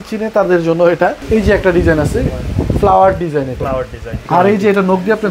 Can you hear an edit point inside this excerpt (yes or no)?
yes